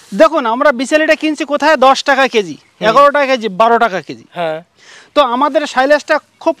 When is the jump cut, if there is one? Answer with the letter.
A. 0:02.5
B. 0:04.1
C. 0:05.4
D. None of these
D